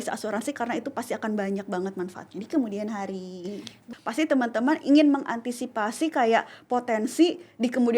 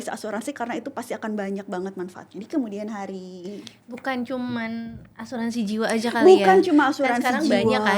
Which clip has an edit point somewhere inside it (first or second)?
first